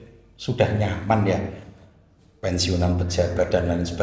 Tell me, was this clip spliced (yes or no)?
no